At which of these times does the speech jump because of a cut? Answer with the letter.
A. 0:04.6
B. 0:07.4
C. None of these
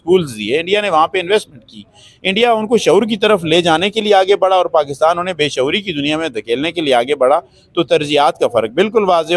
C